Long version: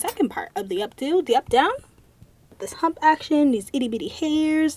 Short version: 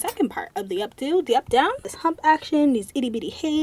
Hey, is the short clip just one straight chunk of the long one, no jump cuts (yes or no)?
no